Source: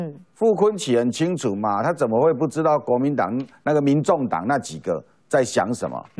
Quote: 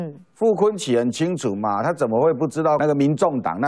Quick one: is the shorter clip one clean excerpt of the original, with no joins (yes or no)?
no